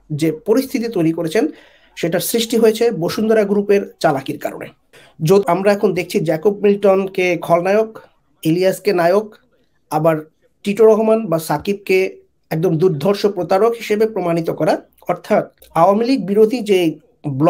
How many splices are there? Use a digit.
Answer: 2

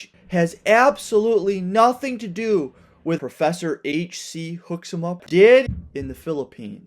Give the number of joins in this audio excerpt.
3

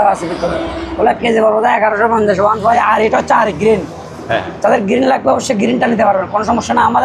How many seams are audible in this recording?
1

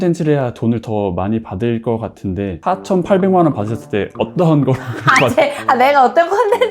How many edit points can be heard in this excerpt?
1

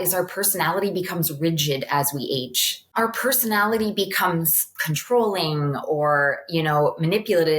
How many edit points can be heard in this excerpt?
1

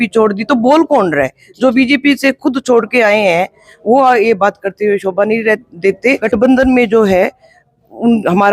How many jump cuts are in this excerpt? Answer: 1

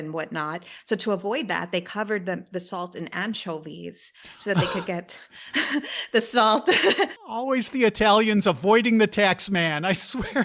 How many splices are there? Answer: 1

